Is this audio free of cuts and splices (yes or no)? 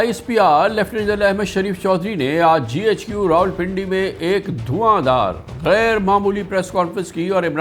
yes